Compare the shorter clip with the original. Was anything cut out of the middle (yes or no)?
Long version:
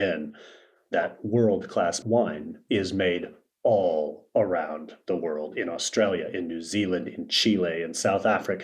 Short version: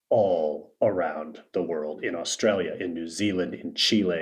no